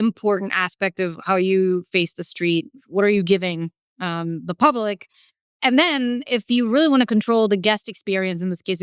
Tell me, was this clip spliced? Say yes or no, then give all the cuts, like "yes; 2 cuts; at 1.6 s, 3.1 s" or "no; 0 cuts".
yes; 1 cut; at 2.8 s